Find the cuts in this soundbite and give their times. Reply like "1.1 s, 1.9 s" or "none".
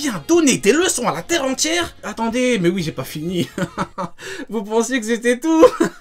2.0 s